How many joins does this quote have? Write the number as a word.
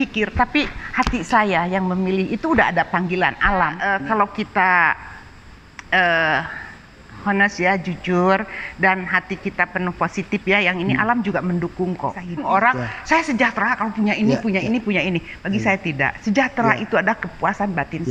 two